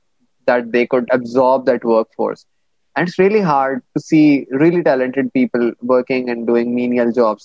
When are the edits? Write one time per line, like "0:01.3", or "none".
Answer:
0:01.0